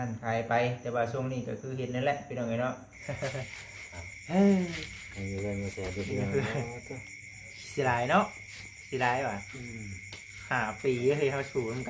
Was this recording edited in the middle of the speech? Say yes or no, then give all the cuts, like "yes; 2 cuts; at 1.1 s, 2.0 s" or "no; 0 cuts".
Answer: yes; 1 cut; at 2.9 s